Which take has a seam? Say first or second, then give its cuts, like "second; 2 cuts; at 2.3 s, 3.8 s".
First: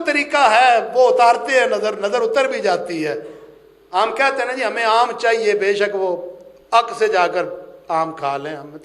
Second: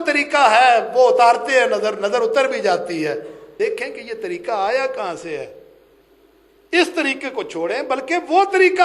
second; 1 cut; at 3.4 s